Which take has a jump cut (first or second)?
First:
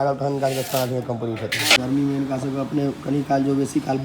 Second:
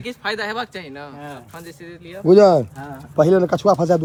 first